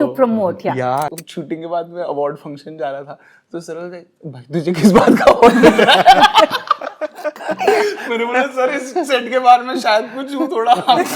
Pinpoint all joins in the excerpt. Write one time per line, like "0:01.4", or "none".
0:01.1